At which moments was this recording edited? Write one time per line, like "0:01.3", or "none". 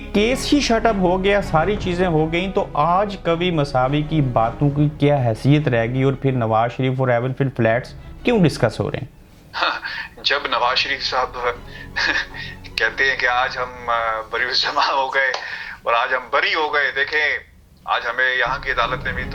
none